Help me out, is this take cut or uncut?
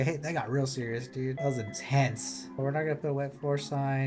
cut